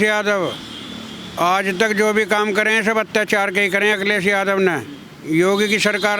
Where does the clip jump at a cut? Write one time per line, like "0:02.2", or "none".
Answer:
none